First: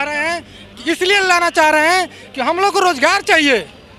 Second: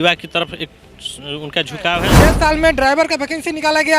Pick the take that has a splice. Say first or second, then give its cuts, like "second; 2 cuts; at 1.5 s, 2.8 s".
second; 1 cut; at 2.2 s